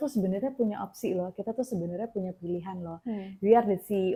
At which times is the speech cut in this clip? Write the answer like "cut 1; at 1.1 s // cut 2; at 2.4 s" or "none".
none

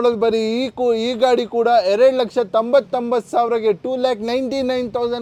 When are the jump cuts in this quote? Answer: none

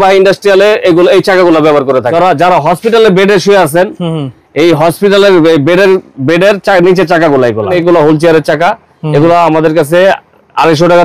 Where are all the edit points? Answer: cut 1; at 2.1 s // cut 2; at 7.8 s

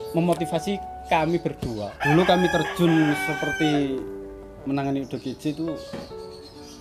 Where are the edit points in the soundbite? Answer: cut 1; at 1.8 s

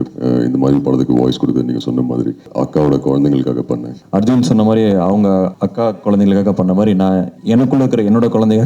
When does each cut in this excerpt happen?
cut 1; at 2.5 s // cut 2; at 3.9 s // cut 3; at 5.6 s // cut 4; at 7.3 s

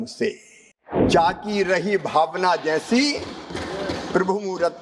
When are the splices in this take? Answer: cut 1; at 1.1 s

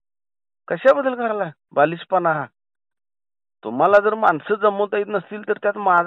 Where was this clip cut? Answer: none

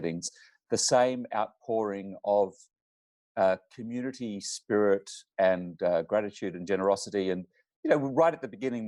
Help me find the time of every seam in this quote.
none

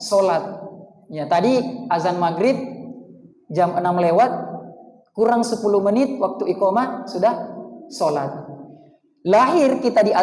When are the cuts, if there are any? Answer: none

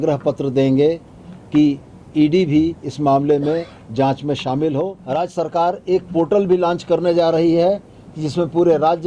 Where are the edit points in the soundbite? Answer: cut 1; at 5.0 s

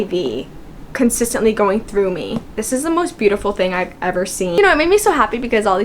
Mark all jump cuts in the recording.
cut 1; at 2.6 s // cut 2; at 4.5 s

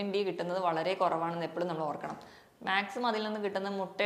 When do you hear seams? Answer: none

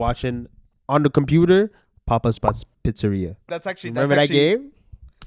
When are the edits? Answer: cut 1; at 3.4 s

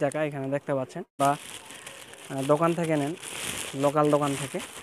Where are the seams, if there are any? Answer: cut 1; at 1.2 s

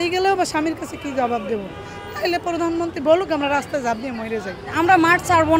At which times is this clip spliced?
cut 1; at 4.7 s

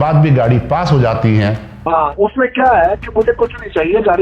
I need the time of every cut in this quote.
cut 1; at 1.7 s

